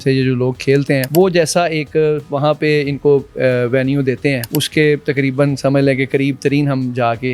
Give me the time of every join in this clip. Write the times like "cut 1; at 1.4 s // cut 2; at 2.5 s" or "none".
cut 1; at 1.1 s // cut 2; at 4.4 s

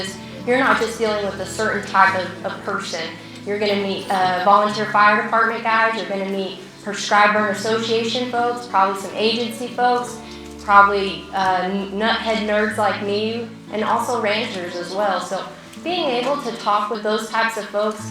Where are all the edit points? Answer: cut 1; at 13.5 s // cut 2; at 17.0 s

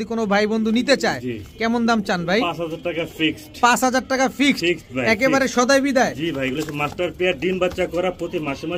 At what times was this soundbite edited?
none

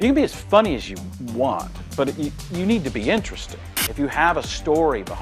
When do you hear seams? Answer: cut 1; at 3.6 s

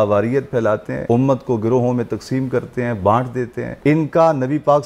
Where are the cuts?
cut 1; at 0.9 s // cut 2; at 3.6 s

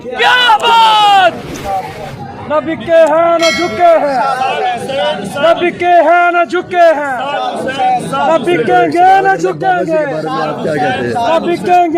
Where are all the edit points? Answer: cut 1; at 1.6 s

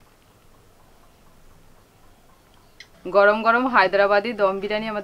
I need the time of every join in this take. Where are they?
none

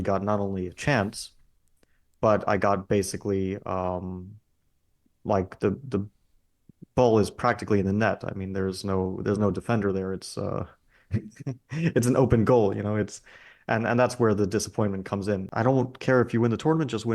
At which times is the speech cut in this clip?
cut 1; at 15.5 s

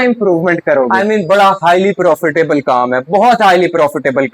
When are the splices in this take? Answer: cut 1; at 0.9 s

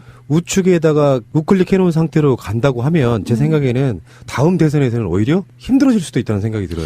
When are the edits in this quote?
cut 1; at 4.1 s

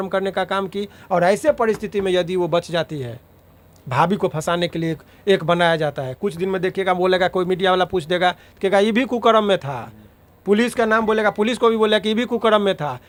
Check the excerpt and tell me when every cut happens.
none

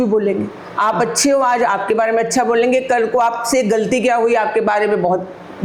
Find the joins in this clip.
none

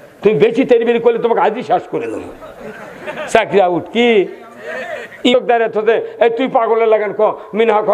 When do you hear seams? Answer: cut 1; at 5.3 s

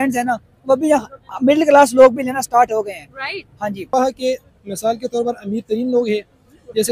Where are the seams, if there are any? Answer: cut 1; at 3.9 s

